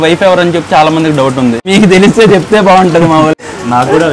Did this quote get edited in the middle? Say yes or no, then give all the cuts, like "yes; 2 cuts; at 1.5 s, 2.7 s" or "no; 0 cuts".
yes; 2 cuts; at 1.7 s, 3.4 s